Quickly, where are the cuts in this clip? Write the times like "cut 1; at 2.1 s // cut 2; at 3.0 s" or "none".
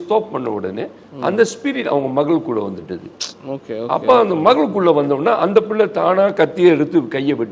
none